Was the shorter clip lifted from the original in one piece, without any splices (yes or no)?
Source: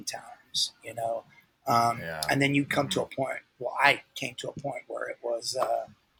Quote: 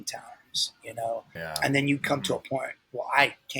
no